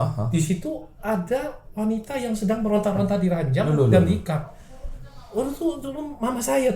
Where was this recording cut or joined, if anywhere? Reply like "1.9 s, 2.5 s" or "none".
none